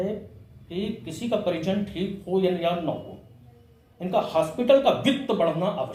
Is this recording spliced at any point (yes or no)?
no